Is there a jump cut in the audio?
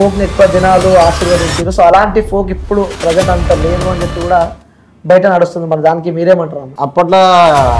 yes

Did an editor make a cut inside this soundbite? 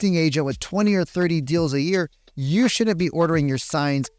no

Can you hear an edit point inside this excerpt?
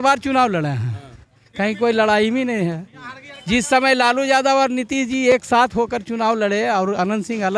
no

